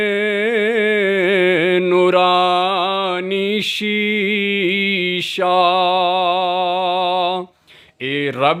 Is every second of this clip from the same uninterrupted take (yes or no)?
yes